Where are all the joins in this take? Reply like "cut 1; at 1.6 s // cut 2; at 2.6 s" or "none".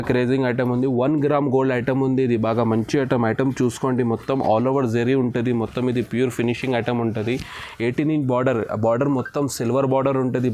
none

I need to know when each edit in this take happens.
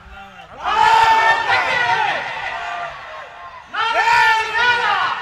none

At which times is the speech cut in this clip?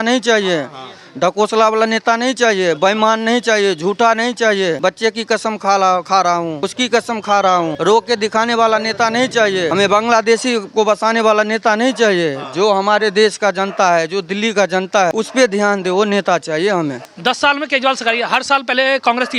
cut 1; at 4.8 s // cut 2; at 6.6 s // cut 3; at 7.7 s // cut 4; at 9.7 s // cut 5; at 15.1 s // cut 6; at 17.1 s

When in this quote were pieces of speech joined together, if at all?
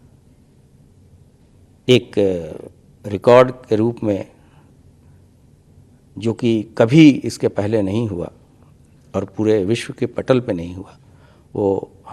none

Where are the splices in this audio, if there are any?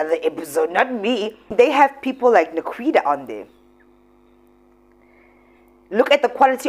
cut 1; at 1.5 s

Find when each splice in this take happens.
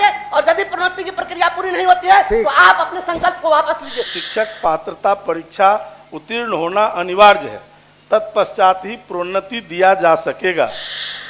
cut 1; at 4.1 s

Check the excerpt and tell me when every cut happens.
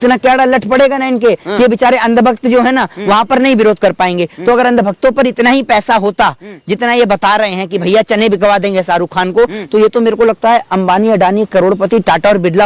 none

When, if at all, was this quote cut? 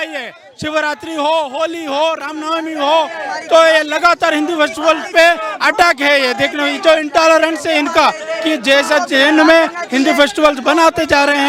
none

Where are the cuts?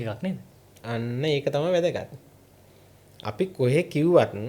none

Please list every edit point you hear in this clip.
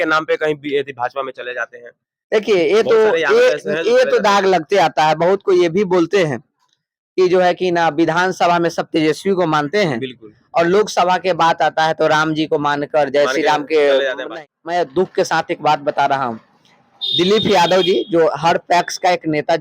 cut 1; at 14.3 s

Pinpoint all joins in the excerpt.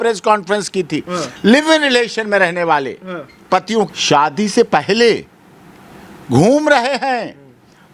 cut 1; at 4.0 s

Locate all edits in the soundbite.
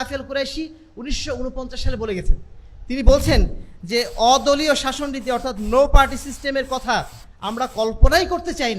none

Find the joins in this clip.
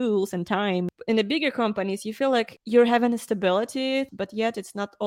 cut 1; at 0.9 s // cut 2; at 2.6 s // cut 3; at 4.1 s

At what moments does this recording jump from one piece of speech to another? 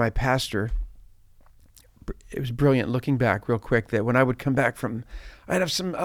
none

